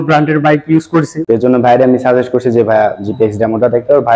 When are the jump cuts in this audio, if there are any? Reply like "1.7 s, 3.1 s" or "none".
1.2 s